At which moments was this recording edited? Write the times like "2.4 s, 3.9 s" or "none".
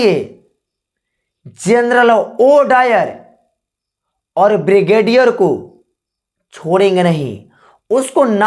none